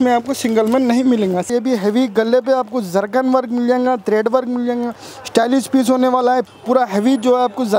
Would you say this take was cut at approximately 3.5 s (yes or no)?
no